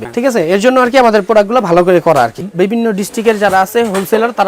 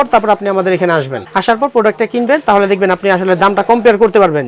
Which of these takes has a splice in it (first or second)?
first